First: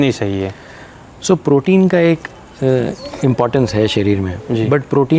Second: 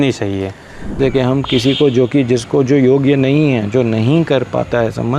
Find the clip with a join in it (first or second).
second